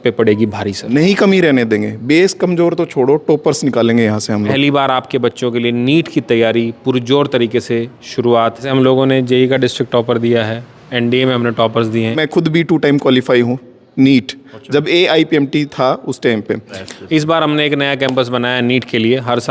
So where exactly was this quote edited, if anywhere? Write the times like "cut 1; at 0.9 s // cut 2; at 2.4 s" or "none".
cut 1; at 0.9 s // cut 2; at 4.5 s // cut 3; at 8.7 s // cut 4; at 12.2 s // cut 5; at 16.8 s